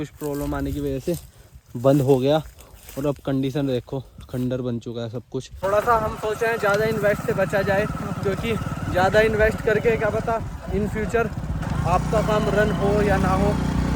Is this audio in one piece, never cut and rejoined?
no; 1 cut; at 5.5 s

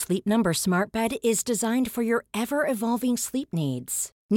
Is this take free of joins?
yes; 0 cuts

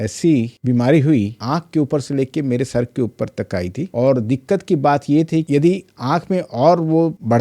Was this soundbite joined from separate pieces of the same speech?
yes; 3 cuts; at 1.4 s, 3.8 s, 5.5 s

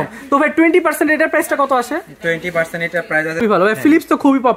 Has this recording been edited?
yes; 1 cut; at 3.4 s

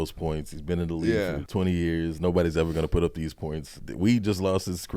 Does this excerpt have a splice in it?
yes; 2 cuts; at 1.4 s, 3.8 s

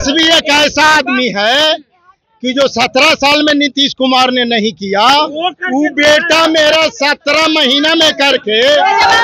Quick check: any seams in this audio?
no; 0 cuts

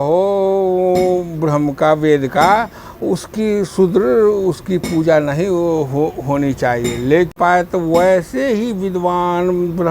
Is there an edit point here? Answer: yes; 1 cut; at 7.3 s

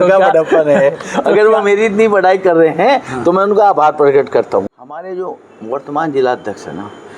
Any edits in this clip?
yes; 1 cut; at 4.8 s

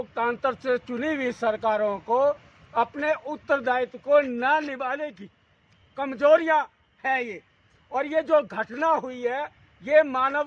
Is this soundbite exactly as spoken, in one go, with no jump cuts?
yes; 0 cuts

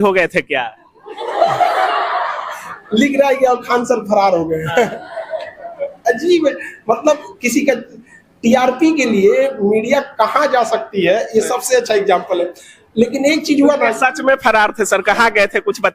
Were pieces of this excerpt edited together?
no; 0 cuts

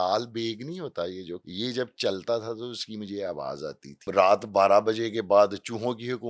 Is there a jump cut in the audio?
yes; 2 cuts; at 1.5 s, 4.0 s

